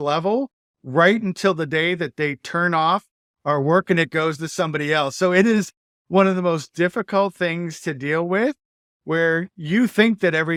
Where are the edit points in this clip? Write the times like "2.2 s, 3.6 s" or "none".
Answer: none

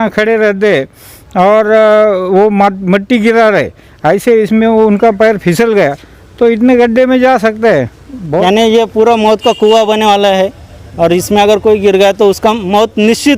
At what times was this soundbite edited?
8.4 s

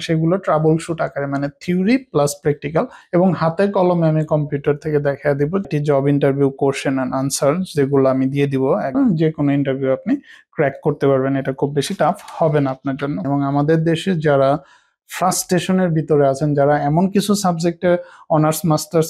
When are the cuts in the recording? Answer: 3.0 s, 5.6 s, 8.9 s, 13.2 s

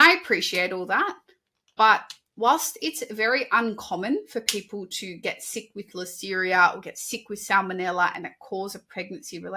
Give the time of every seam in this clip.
none

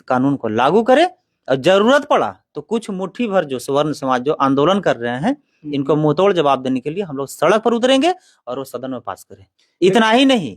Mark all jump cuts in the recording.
none

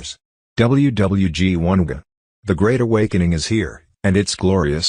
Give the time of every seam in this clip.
1.8 s

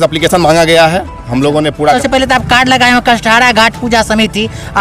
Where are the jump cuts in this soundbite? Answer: 2.0 s

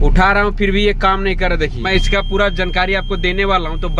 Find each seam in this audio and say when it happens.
1.8 s

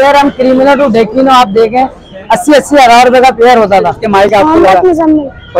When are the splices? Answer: 4.0 s

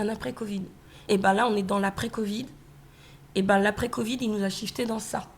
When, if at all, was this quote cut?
1.0 s

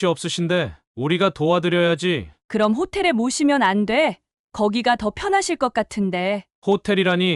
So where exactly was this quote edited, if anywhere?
none

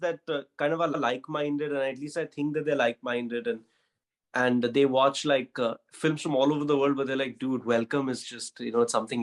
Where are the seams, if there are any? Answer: none

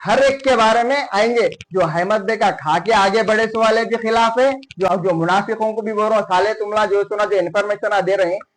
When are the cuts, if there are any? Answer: 4.9 s

